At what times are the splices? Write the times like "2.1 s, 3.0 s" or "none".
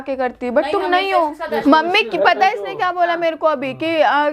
1.6 s